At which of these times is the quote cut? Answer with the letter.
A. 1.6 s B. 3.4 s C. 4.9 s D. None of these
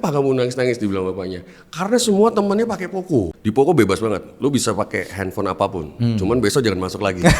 B